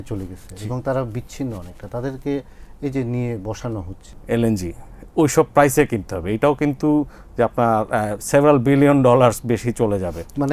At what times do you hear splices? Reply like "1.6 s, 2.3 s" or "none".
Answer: 4.1 s